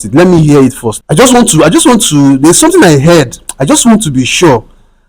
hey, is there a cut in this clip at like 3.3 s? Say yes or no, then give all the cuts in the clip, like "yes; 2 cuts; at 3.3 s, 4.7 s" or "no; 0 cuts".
no; 1 cut; at 0.9 s